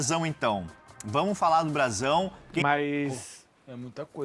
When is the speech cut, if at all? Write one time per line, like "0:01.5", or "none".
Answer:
0:02.5